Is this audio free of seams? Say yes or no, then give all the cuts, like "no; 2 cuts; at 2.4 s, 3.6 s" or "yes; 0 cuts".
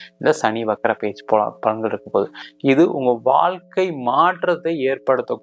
no; 1 cut; at 2.4 s